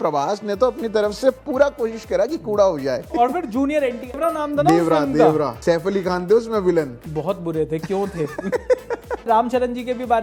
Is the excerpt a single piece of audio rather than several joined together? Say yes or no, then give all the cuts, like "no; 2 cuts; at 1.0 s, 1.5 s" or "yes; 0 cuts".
no; 5 cuts; at 3.1 s, 4.2 s, 5.5 s, 7.0 s, 9.2 s